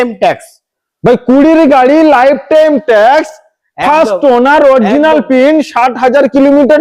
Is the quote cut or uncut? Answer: uncut